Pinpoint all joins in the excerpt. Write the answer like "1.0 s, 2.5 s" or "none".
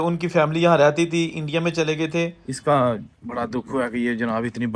2.5 s